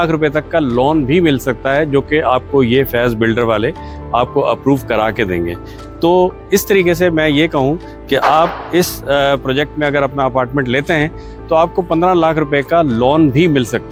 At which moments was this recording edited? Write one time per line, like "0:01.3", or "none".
none

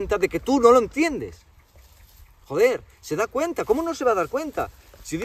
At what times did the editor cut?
none

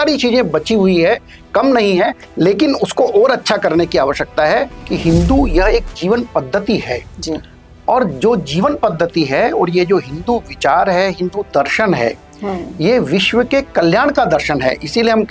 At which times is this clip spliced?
0:04.8

